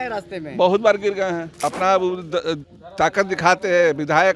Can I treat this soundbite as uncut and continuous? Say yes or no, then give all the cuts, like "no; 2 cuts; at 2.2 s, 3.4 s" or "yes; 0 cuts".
no; 1 cut; at 1.6 s